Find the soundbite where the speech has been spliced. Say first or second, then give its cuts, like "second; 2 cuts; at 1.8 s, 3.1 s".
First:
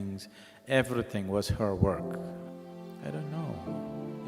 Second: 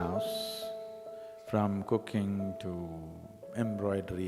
first; 1 cut; at 2.5 s